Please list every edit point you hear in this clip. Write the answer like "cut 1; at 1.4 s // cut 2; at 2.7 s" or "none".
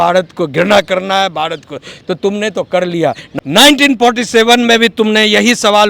cut 1; at 3.2 s

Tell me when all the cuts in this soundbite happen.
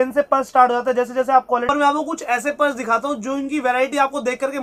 cut 1; at 1.7 s

